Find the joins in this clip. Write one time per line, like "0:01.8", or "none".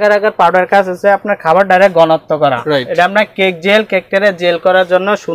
0:02.6